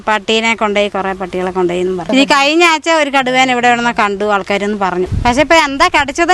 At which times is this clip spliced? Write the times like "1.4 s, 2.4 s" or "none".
2.1 s, 5.1 s